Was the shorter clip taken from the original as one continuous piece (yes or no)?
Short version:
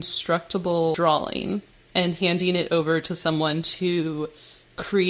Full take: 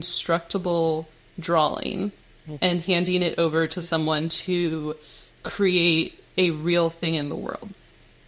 no